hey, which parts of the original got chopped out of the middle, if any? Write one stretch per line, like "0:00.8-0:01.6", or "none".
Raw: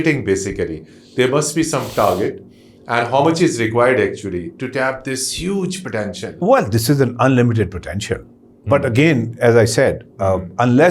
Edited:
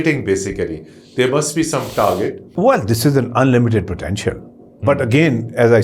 0:02.4-0:06.3